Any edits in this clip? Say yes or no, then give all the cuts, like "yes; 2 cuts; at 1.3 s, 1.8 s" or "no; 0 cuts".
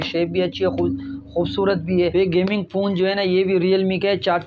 yes; 1 cut; at 2.1 s